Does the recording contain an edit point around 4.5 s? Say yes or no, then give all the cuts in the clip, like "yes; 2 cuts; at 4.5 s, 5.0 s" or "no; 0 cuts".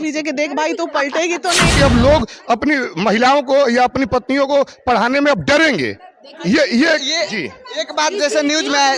no; 1 cut; at 1.7 s